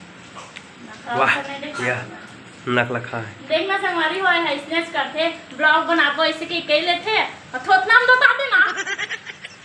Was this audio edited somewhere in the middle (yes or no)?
no